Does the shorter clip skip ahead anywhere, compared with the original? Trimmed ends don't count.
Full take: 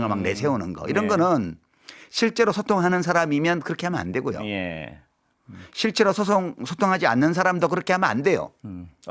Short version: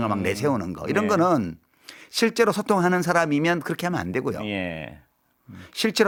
no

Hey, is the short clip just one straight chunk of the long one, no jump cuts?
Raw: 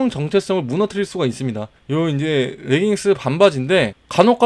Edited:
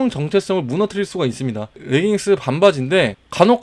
no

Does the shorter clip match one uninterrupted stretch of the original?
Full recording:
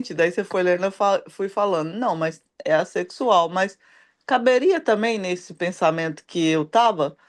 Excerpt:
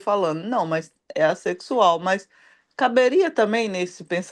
yes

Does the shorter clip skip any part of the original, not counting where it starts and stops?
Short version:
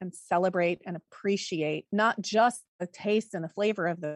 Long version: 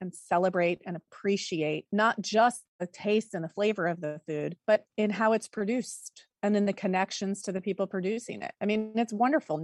no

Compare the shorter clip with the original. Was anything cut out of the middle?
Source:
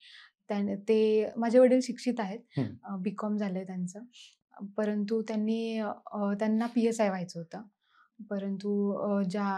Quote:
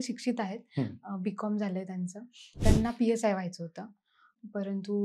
yes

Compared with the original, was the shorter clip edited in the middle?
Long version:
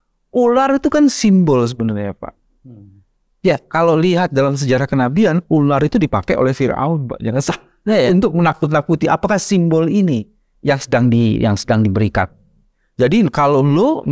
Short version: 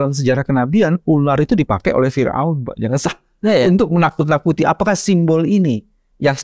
no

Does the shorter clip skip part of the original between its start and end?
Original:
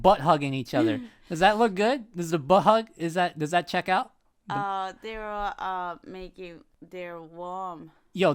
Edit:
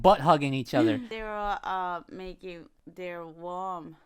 yes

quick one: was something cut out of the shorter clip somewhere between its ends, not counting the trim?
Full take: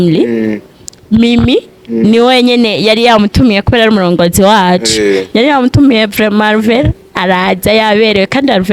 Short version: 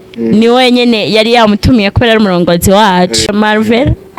yes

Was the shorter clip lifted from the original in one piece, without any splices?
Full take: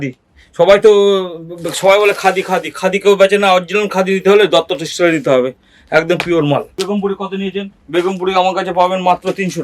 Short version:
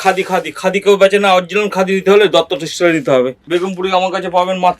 no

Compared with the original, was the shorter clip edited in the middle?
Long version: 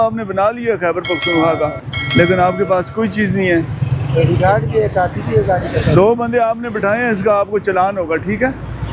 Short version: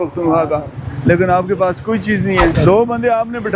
yes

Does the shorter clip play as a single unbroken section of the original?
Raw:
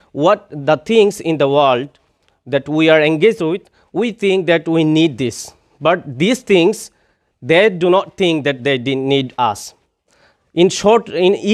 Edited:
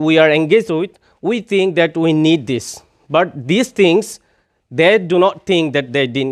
yes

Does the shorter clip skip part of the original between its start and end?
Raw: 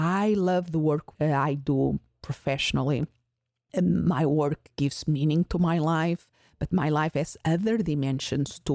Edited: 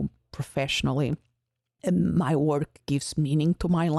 no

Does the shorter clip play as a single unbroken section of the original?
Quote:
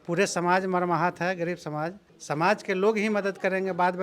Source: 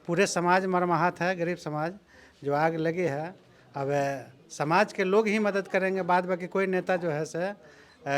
no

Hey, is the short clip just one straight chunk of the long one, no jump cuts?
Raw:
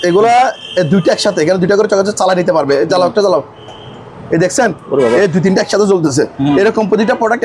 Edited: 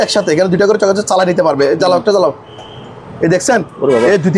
yes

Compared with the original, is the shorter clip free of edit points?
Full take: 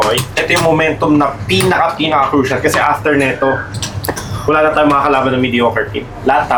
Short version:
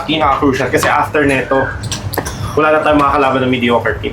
yes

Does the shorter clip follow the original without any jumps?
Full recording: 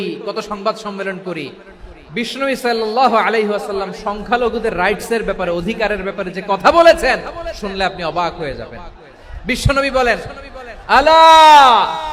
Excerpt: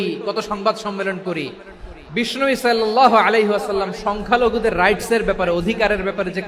yes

